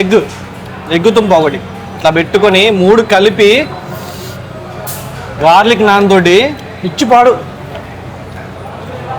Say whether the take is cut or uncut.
uncut